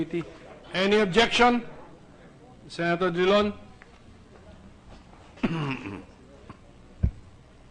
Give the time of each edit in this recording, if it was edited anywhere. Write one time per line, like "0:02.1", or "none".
0:05.6